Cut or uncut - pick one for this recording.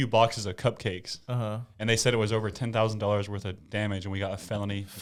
uncut